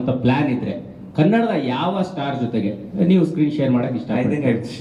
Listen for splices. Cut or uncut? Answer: uncut